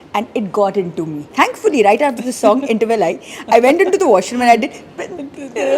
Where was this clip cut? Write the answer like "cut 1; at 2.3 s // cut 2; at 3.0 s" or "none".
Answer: cut 1; at 1.2 s

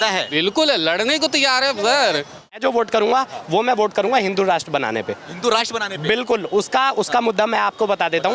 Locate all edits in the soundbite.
cut 1; at 2.6 s

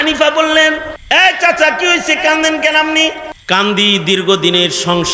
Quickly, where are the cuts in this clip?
cut 1; at 0.9 s // cut 2; at 3.3 s

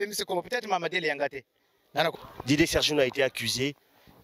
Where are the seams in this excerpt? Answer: cut 1; at 2.1 s

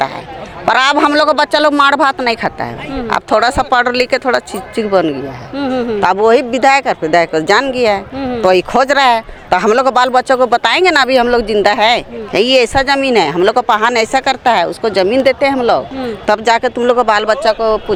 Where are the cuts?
none

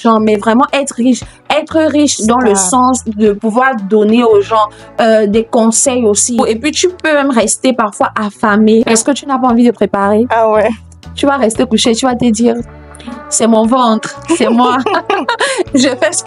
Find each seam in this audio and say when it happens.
cut 1; at 6.4 s // cut 2; at 8.9 s

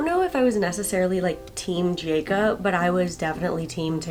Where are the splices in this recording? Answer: none

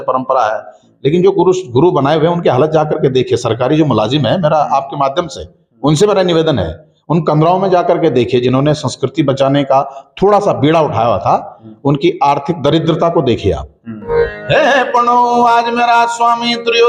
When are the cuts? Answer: cut 1; at 14.1 s

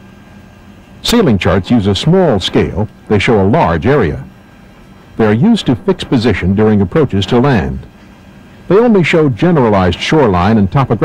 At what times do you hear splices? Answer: cut 1; at 1.5 s

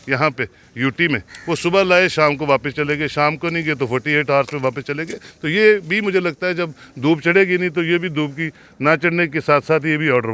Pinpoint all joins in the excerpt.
none

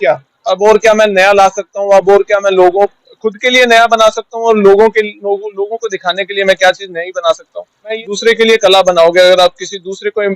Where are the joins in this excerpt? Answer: cut 1; at 7.9 s

